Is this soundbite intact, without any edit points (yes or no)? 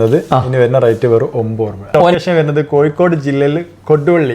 no